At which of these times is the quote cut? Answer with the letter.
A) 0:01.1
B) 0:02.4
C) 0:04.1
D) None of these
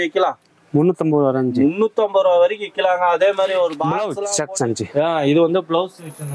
C